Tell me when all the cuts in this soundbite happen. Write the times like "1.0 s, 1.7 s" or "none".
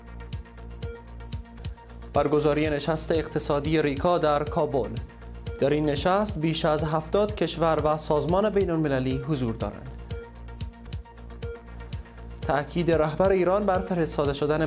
1.1 s